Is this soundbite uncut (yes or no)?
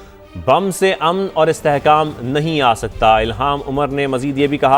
yes